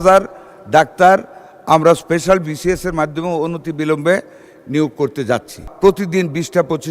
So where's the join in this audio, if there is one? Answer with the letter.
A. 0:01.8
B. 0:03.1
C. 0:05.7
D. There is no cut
C